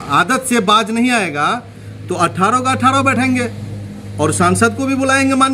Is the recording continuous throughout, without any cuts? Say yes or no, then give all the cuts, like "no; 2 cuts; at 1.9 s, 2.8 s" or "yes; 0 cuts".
yes; 0 cuts